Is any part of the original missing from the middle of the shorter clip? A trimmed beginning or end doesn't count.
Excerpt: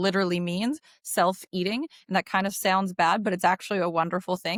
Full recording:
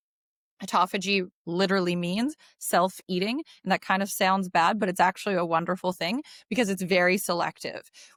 no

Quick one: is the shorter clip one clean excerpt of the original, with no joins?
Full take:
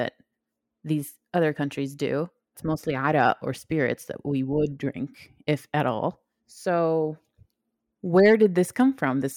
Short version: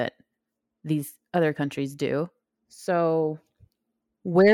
no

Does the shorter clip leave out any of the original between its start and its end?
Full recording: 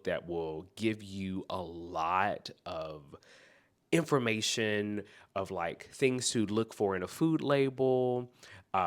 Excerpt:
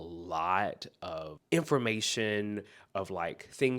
yes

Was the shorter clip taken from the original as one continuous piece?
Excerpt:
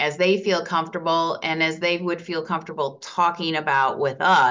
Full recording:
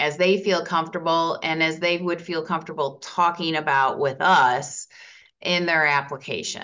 yes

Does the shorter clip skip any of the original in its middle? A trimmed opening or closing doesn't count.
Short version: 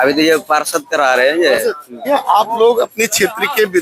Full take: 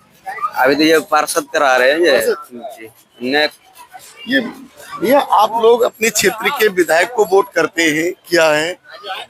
yes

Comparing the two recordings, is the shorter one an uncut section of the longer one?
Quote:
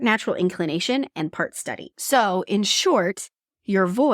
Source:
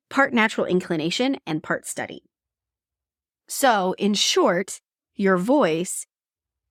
no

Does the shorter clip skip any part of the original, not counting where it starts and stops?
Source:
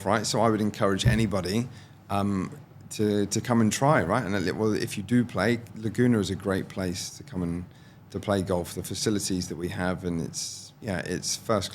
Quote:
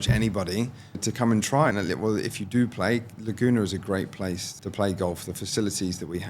yes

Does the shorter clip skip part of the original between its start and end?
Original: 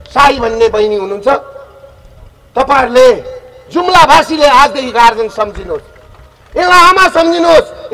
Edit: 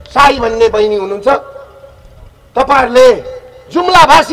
no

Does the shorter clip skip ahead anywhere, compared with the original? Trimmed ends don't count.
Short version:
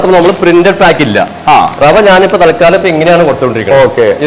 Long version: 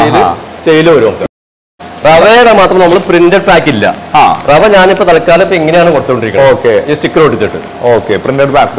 no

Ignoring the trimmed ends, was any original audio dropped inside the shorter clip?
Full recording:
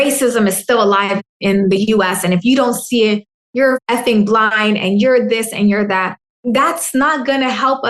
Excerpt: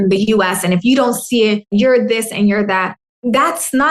yes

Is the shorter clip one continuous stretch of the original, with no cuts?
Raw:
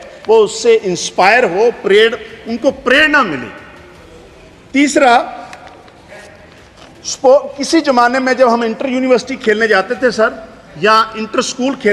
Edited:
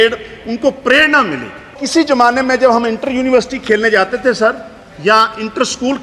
no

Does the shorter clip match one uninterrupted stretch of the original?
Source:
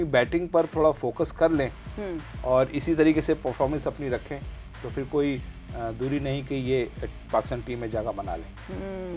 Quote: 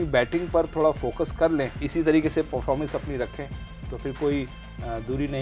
no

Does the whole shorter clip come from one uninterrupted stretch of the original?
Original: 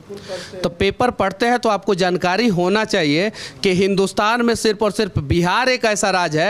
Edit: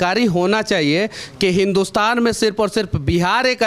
yes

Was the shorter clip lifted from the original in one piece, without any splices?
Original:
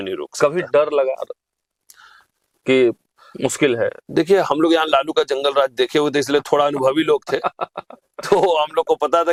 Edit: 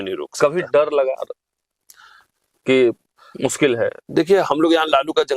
yes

